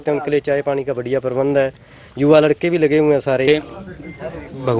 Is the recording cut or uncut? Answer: cut